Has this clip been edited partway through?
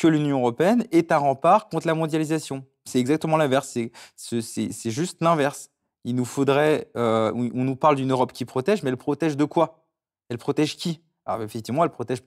no; 0 cuts

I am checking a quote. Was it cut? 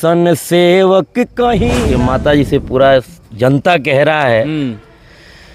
yes; 1 cut; at 1.8 s

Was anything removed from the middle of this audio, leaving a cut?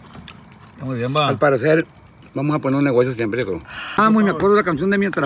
yes; 1 cut; at 4.0 s

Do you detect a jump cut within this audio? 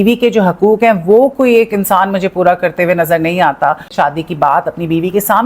yes; 1 cut; at 3.9 s

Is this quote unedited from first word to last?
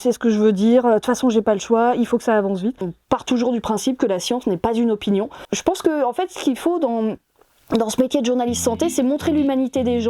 no; 2 cuts; at 2.9 s, 5.5 s

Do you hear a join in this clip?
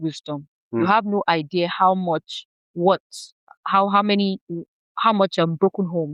no; 0 cuts

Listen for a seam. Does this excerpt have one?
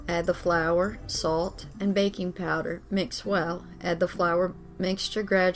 no; 0 cuts

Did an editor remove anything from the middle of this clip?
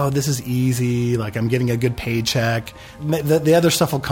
no; 0 cuts

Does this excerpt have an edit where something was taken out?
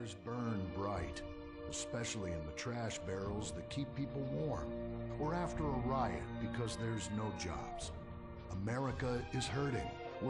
no; 0 cuts

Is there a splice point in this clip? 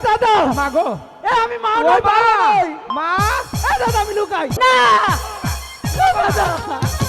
yes; 1 cut; at 4.6 s

